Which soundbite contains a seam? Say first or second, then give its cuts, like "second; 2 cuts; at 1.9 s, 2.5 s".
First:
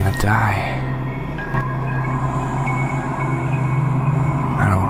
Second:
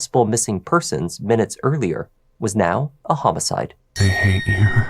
second; 1 cut; at 3.8 s